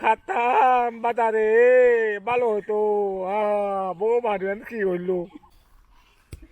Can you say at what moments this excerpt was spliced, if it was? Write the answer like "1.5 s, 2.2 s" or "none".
5.4 s